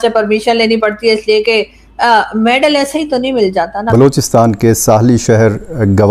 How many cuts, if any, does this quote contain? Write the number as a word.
one